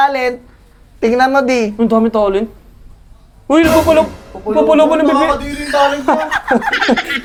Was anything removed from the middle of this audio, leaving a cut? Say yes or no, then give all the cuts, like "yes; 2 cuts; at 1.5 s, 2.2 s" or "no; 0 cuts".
no; 0 cuts